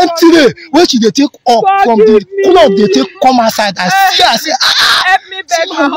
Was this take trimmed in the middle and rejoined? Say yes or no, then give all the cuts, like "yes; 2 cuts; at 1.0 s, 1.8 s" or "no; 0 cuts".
no; 0 cuts